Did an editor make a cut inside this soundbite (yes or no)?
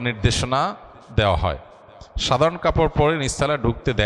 no